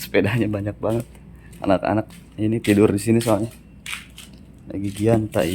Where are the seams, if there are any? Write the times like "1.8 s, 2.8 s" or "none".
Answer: none